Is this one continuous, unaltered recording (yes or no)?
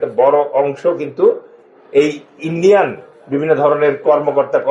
yes